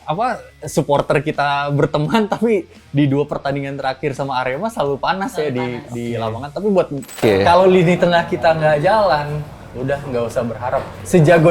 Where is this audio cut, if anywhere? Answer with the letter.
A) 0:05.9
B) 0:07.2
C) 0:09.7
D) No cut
B